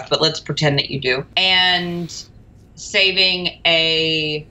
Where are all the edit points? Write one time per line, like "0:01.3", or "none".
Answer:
0:01.3